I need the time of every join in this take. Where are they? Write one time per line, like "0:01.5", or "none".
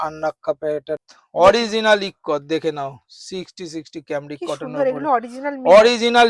0:01.0